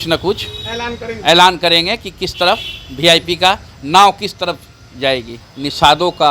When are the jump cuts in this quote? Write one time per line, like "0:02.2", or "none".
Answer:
0:05.4